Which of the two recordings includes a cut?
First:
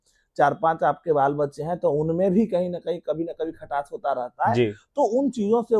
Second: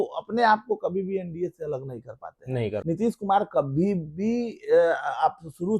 second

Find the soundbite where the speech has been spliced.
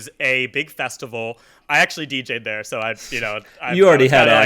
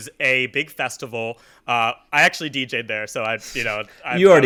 first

